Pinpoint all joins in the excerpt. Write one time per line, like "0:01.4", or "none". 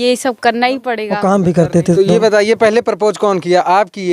0:01.2